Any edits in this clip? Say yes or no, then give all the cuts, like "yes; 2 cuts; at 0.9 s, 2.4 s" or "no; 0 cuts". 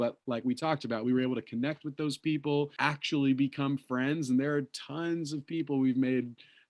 yes; 1 cut; at 2.7 s